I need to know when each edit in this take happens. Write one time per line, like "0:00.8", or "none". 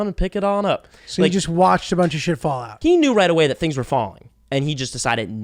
0:02.7